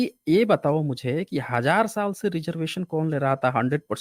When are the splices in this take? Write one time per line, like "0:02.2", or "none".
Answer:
none